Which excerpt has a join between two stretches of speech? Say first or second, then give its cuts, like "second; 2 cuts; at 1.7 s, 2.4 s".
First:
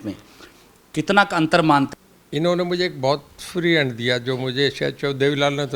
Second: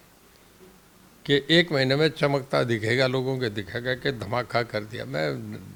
first; 1 cut; at 1.9 s